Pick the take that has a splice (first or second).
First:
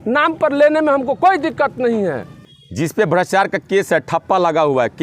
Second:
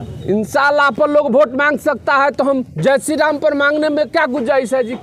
first